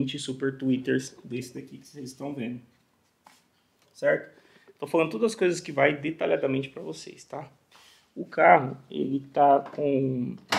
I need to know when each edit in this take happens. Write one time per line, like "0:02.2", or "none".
none